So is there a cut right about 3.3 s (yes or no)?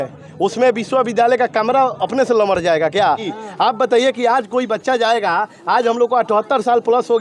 yes